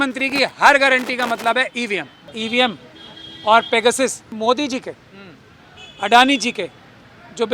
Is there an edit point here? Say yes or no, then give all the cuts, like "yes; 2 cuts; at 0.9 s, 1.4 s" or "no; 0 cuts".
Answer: yes; 2 cuts; at 2.4 s, 4.3 s